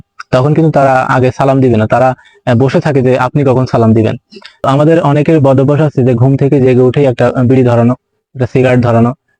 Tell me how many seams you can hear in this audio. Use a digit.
1